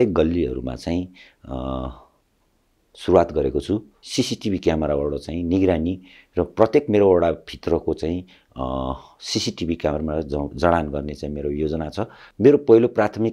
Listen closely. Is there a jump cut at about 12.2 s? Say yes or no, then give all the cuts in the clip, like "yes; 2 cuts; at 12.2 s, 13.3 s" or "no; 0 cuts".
yes; 2 cuts; at 4.0 s, 12.2 s